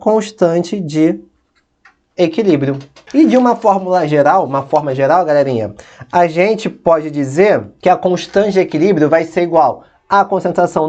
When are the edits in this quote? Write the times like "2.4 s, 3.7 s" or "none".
2.9 s, 7.7 s